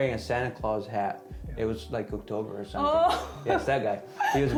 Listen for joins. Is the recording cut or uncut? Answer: uncut